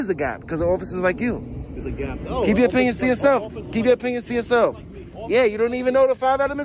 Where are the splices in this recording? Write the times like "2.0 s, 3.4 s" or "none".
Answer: none